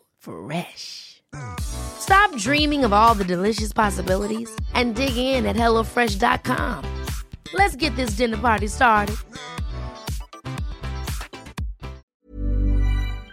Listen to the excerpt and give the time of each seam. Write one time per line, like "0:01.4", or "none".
0:12.1